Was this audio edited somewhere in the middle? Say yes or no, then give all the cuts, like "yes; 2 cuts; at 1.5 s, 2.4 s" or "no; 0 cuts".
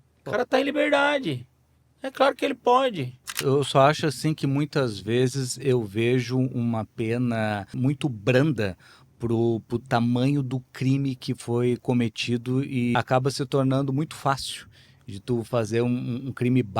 yes; 3 cuts; at 3.4 s, 7.7 s, 12.9 s